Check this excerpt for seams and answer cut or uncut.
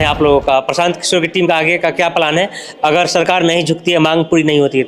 uncut